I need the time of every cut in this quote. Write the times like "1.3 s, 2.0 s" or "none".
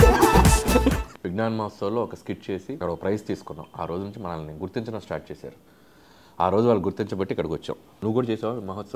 1.0 s, 2.8 s, 7.9 s